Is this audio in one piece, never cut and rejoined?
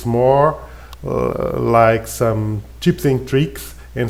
yes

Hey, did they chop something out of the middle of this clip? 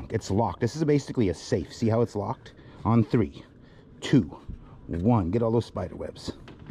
no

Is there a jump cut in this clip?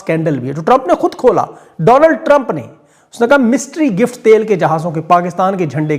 no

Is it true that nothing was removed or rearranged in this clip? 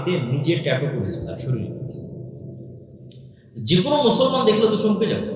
yes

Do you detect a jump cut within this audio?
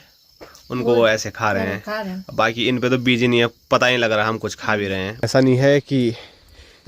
yes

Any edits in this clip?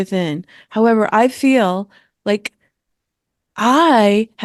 no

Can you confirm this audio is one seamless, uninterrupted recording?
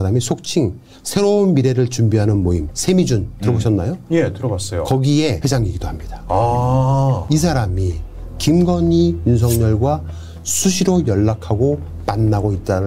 no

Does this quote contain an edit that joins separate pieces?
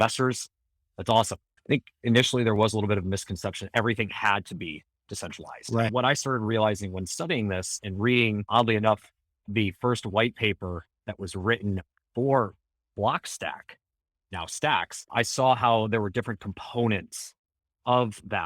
yes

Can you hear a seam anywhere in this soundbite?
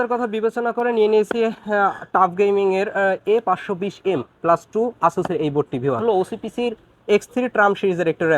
yes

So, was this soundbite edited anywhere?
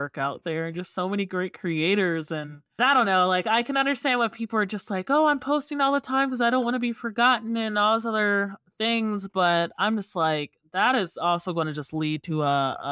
yes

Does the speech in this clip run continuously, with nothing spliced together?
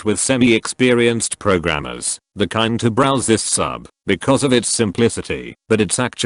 yes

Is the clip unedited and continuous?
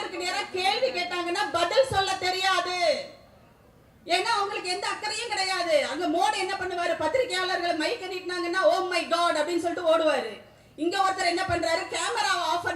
yes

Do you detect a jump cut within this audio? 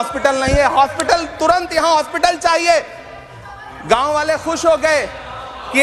no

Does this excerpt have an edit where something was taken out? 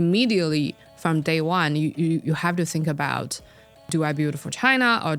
yes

